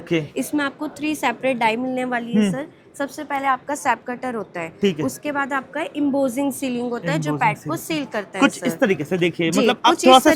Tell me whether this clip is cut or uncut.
uncut